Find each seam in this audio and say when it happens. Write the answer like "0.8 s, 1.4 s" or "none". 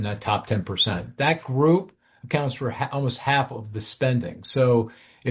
1.1 s